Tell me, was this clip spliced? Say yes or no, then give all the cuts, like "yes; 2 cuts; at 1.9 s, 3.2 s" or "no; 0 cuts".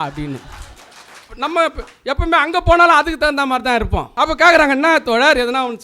yes; 2 cuts; at 1.3 s, 4.1 s